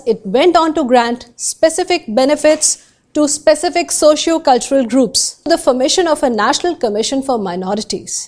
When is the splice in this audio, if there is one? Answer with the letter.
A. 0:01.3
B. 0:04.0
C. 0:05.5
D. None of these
C